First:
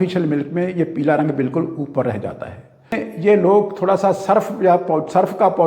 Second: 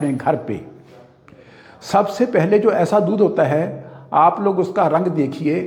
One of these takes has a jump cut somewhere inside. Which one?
first; 1 cut; at 2.9 s

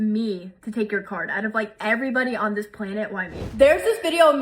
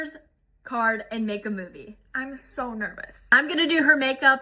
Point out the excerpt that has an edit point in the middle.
first; 1 cut; at 3.5 s

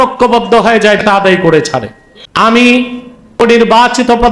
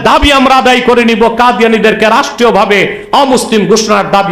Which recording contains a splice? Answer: first; 3 cuts; at 1.0 s, 2.4 s, 3.4 s

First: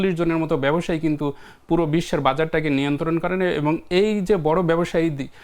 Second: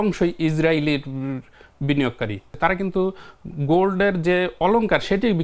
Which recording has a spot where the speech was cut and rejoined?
second; 1 cut; at 2.5 s

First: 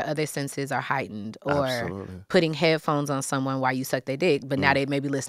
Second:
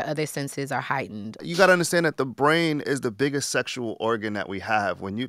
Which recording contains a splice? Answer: second; 1 cut; at 1.4 s

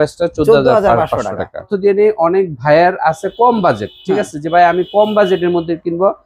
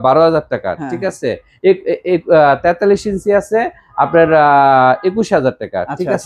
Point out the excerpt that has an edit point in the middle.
first; 1 cut; at 1.7 s

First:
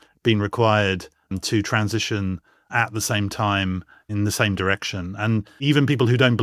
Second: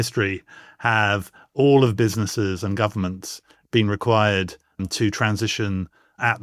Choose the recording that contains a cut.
first; 2 cuts; at 4.1 s, 5.6 s

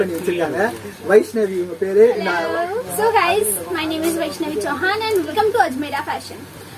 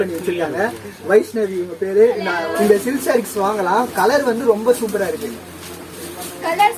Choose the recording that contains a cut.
second; 1 cut; at 2.5 s

